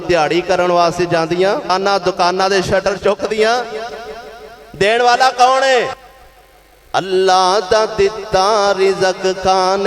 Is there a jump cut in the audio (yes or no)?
yes